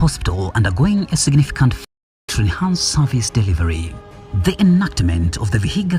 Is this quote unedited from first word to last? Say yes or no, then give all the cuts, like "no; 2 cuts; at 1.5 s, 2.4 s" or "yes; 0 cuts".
yes; 0 cuts